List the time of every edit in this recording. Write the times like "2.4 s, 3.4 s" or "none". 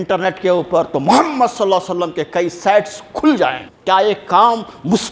3.7 s

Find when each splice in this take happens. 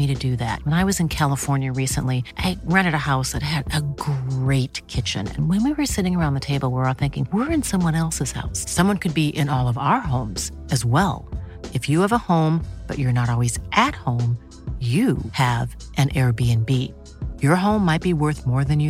none

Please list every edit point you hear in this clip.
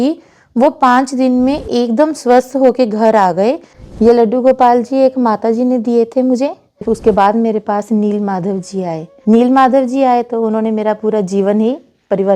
3.6 s, 6.8 s, 9.1 s

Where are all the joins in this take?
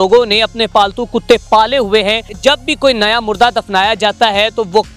2.3 s

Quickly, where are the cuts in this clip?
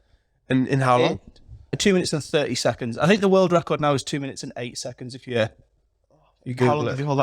1.8 s

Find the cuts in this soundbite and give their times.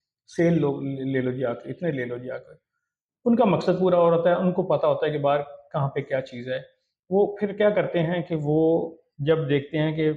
none

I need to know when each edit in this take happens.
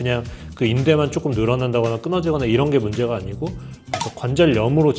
3.9 s

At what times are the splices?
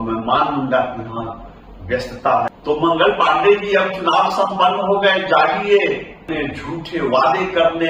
2.2 s, 6.3 s

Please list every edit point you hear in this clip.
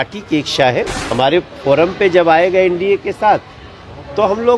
1.0 s

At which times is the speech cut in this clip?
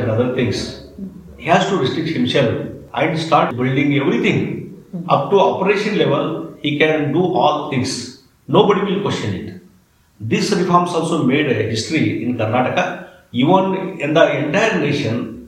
2.8 s

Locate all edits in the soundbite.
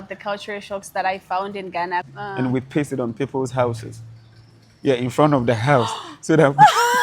2.1 s

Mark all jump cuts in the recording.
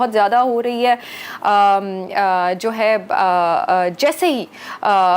none

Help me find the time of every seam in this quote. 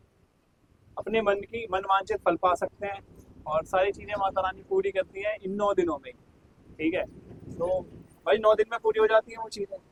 none

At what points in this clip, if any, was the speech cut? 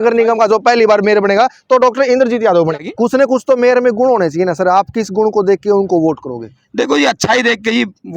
2.9 s

